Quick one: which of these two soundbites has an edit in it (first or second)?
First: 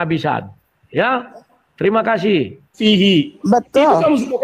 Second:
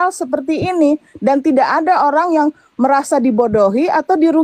first